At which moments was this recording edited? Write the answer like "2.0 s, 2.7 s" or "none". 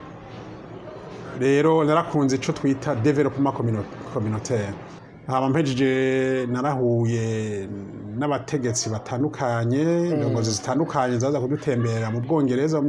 4.8 s